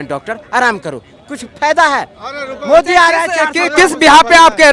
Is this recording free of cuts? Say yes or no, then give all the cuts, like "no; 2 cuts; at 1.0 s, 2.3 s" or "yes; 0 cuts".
yes; 0 cuts